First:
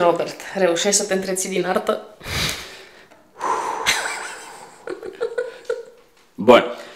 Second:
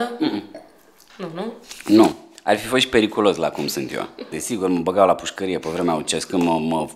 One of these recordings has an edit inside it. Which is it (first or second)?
second